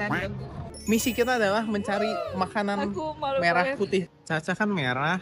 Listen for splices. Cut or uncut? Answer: cut